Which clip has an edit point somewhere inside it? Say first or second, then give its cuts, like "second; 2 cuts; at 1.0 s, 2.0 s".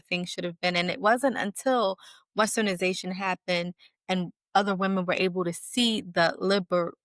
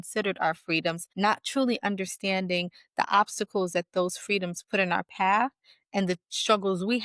second; 1 cut; at 1.1 s